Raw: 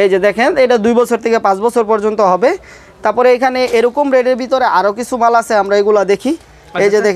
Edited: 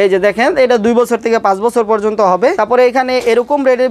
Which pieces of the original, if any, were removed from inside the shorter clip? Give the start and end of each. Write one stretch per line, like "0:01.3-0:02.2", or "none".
0:02.6-0:03.1